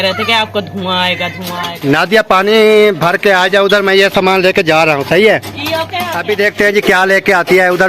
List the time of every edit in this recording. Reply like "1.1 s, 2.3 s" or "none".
1.7 s, 6.2 s